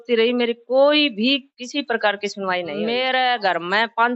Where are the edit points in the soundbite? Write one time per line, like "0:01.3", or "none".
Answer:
0:02.7